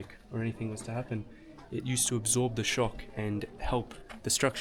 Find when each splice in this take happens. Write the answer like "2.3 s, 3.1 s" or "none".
none